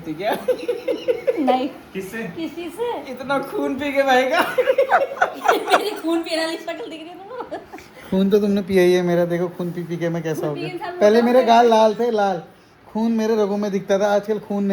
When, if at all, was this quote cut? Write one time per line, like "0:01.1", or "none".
none